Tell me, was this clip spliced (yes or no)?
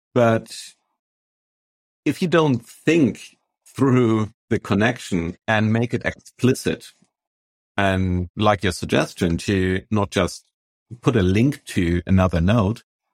yes